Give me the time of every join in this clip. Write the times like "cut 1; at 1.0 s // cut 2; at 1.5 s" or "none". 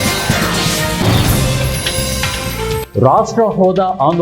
none